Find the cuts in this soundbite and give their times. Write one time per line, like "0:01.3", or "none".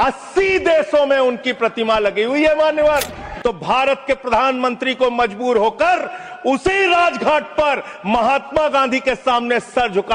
0:03.3